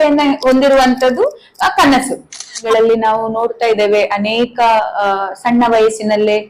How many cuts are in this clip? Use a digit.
1